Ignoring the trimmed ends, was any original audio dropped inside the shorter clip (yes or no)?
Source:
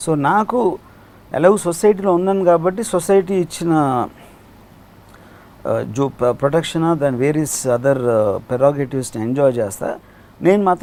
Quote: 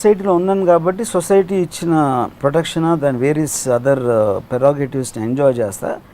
yes